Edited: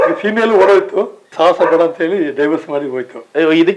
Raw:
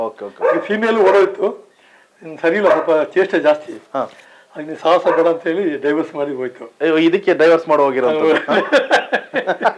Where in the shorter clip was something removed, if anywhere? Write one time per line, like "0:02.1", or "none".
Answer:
0:01.2